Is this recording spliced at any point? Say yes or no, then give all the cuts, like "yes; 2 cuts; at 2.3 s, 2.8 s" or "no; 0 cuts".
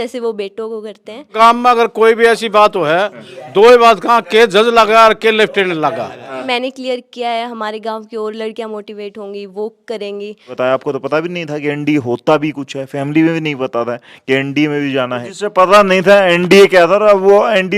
yes; 4 cuts; at 1.3 s, 6.4 s, 10.5 s, 15.3 s